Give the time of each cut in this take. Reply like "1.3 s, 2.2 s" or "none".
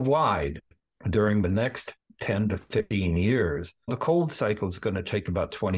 3.9 s